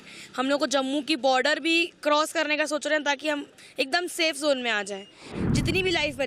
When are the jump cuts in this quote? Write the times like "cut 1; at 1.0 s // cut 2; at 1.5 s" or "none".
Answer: cut 1; at 5.4 s